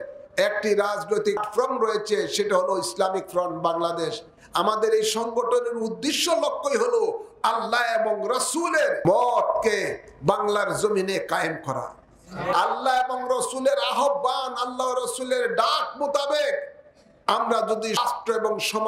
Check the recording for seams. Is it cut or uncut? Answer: cut